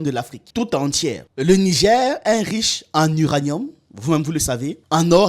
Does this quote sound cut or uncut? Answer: cut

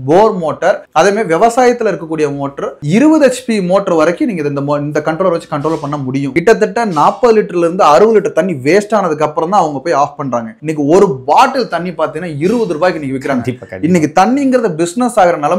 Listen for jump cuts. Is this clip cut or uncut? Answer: cut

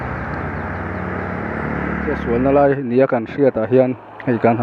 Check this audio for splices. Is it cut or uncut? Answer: cut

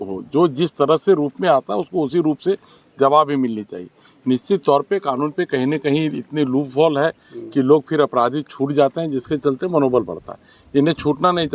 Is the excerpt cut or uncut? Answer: uncut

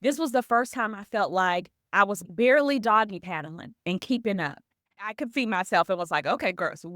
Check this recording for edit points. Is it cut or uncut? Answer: cut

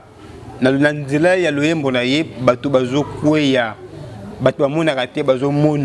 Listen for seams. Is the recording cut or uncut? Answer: uncut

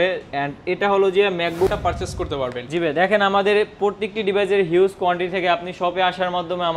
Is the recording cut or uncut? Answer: cut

